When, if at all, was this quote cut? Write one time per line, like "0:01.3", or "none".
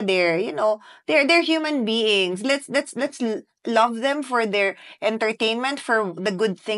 none